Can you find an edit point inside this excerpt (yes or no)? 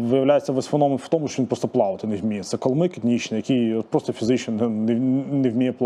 no